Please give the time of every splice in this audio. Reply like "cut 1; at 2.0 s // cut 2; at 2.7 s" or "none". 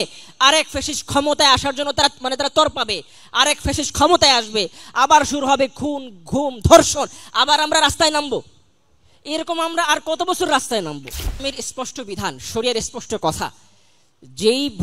cut 1; at 11.4 s